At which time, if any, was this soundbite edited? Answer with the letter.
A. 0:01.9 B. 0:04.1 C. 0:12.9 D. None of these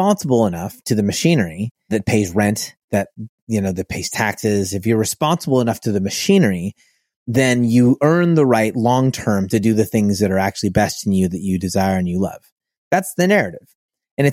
A